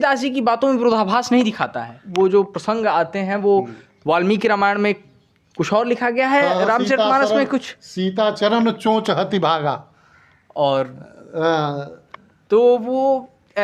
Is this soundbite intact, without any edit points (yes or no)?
no